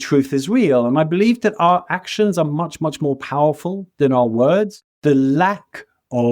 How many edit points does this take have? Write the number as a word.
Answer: one